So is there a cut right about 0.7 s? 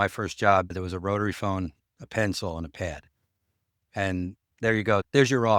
yes; 2 cuts; at 0.7 s, 4.5 s

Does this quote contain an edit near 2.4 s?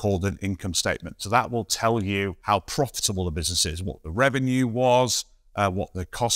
yes; 1 cut; at 2.4 s

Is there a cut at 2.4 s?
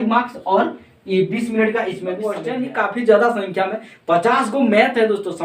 yes; 1 cut; at 2.4 s

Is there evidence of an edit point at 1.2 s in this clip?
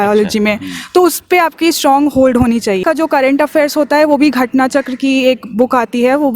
no; 1 cut; at 2.8 s

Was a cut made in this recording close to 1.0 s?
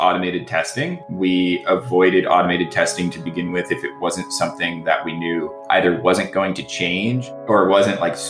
no; 2 cuts; at 5.6 s, 7.2 s

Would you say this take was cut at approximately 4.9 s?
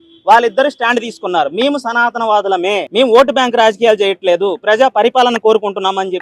no; 1 cut; at 2.9 s

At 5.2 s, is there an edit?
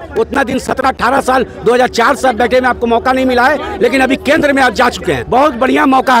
yes; 1 cut; at 5.2 s

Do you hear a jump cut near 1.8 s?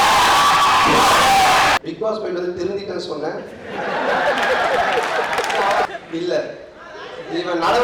yes; 2 cuts; at 1.8 s, 5.9 s

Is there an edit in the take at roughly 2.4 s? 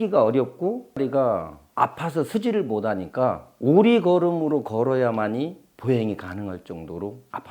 no; 1 cut; at 1.0 s

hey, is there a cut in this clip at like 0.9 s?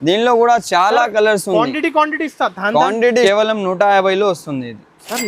no; 1 cut; at 3.2 s

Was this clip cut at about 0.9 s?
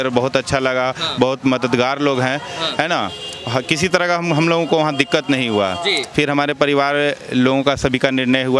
no; 0 cuts

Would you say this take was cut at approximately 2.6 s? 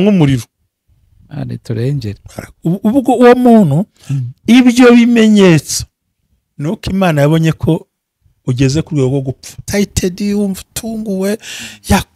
no; 1 cut; at 9.6 s

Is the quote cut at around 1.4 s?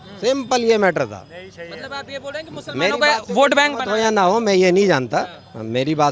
no; 0 cuts

